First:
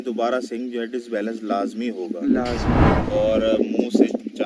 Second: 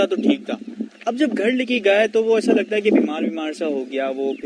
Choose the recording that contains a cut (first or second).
first